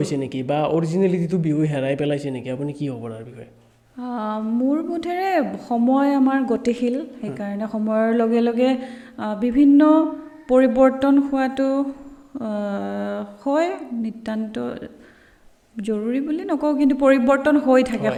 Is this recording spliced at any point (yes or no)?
no